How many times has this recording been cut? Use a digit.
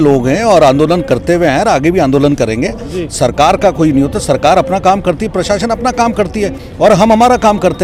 0